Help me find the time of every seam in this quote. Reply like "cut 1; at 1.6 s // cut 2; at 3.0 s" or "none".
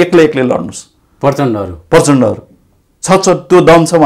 none